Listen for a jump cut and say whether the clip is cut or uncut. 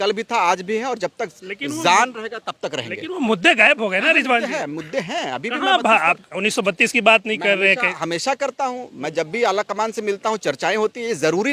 uncut